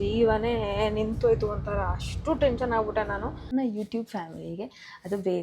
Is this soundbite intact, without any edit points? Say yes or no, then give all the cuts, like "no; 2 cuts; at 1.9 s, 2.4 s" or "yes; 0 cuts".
no; 1 cut; at 3.5 s